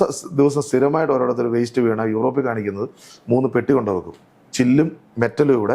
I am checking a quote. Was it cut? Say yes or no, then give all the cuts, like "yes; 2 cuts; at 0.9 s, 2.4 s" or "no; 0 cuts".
no; 0 cuts